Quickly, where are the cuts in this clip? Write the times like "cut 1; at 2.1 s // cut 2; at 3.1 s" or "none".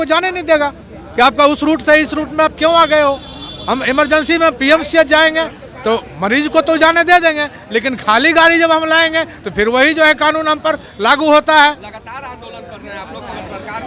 none